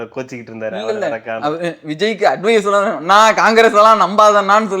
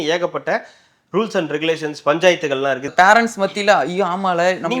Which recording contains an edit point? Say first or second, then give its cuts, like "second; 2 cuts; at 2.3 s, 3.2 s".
second; 1 cut; at 2.9 s